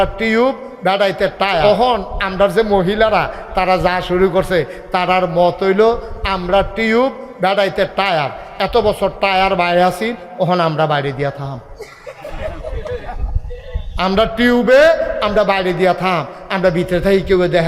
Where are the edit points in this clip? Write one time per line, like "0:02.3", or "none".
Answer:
0:01.6